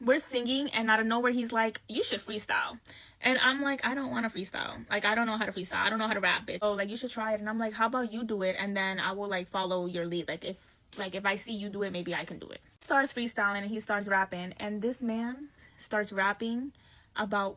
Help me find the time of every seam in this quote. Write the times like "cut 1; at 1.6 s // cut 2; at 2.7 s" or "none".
cut 1; at 6.6 s